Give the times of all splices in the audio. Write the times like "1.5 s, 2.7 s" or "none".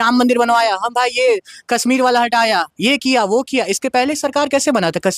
none

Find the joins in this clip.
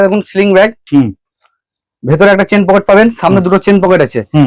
none

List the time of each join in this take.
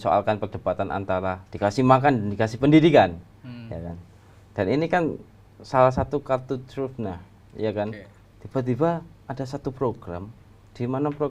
1.5 s

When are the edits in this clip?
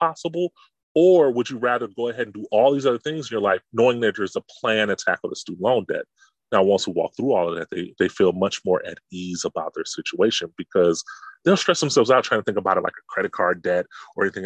3.7 s

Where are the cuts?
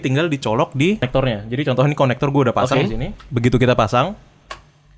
1.1 s, 3.2 s

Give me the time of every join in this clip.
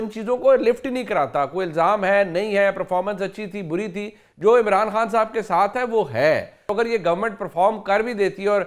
6.7 s

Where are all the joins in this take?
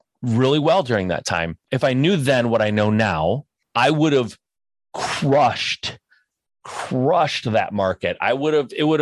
1.7 s, 3.6 s

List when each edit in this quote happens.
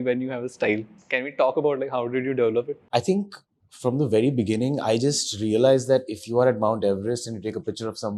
0.9 s, 2.8 s

